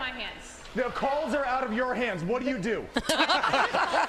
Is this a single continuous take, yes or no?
yes